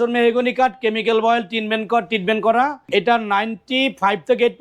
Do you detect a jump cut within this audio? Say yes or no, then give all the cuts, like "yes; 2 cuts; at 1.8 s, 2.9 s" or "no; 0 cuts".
yes; 1 cut; at 2.8 s